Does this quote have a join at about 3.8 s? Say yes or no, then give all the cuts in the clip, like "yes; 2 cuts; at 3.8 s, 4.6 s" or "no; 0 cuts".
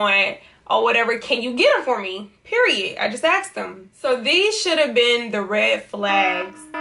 yes; 1 cut; at 3.8 s